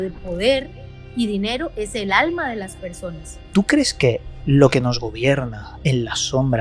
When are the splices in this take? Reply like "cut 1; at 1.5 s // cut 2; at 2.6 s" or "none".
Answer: cut 1; at 3.3 s